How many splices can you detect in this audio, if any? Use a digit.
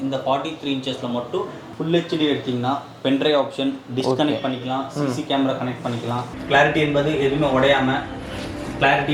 2